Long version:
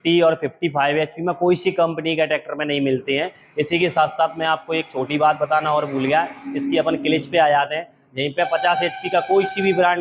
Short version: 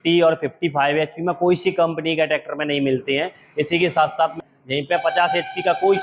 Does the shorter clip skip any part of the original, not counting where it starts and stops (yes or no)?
yes